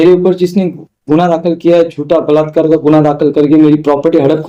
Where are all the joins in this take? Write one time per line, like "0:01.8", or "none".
none